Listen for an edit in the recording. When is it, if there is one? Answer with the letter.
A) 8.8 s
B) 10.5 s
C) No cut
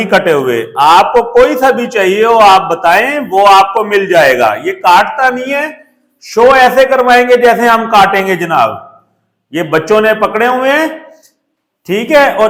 C